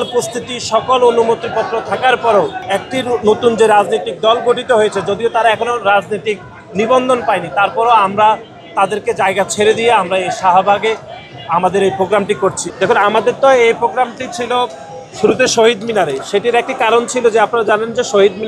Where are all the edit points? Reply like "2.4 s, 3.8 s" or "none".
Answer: 2.6 s, 12.6 s